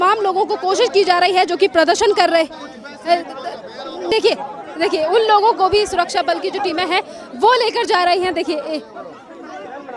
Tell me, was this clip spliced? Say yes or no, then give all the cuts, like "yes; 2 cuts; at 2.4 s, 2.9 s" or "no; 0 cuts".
yes; 1 cut; at 4.1 s